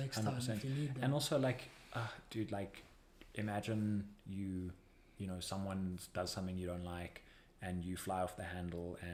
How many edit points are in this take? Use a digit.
0